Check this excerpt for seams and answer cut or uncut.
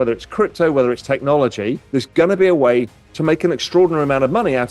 cut